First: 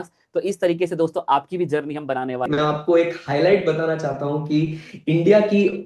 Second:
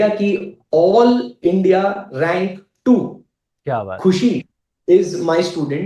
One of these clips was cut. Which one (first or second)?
first